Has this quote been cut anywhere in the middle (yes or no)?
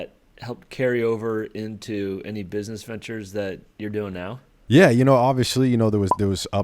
yes